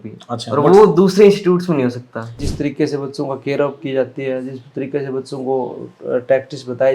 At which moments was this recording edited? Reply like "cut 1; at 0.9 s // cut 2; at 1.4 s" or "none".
cut 1; at 2.4 s